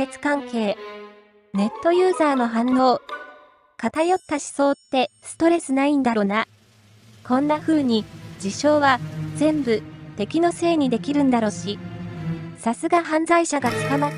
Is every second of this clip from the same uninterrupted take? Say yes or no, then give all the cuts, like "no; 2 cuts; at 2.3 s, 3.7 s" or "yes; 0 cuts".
yes; 0 cuts